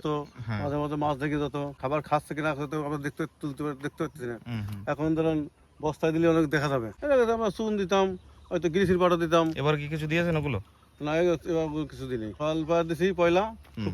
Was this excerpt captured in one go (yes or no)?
no